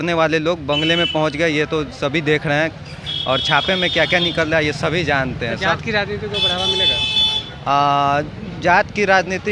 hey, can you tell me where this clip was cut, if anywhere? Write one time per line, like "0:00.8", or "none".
none